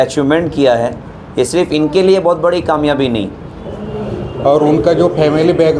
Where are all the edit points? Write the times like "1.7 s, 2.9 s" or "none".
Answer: 3.6 s